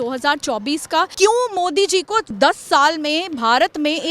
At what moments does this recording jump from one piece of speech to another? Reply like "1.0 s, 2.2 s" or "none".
1.1 s, 2.3 s